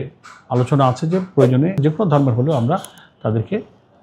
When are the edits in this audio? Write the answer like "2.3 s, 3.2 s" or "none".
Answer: 1.8 s